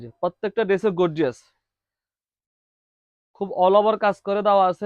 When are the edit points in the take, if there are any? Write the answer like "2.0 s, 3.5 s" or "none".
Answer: none